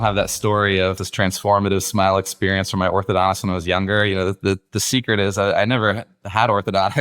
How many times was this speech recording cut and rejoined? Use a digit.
1